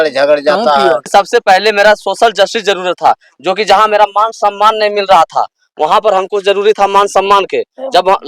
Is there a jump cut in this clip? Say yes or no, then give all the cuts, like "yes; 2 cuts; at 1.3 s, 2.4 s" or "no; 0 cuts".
yes; 1 cut; at 1.1 s